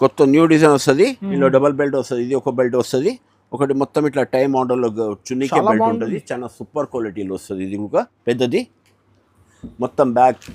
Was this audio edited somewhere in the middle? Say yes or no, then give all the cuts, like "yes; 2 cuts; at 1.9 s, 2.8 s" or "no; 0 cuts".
yes; 1 cut; at 8.1 s